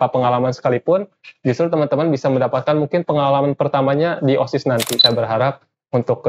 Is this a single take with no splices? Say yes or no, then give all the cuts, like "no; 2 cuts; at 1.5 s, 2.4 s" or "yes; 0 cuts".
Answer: no; 1 cut; at 5.0 s